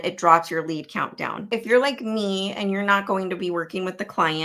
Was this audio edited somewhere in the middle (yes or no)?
yes